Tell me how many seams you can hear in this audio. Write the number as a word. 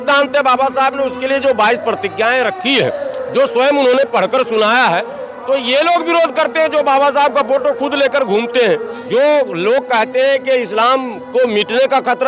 one